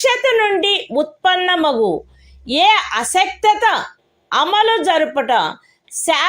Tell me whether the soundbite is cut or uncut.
uncut